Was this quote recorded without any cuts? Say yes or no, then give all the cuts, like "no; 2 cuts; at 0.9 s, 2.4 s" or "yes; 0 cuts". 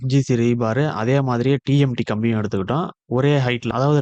yes; 0 cuts